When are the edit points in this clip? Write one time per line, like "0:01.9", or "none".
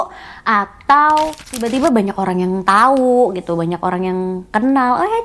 0:01.7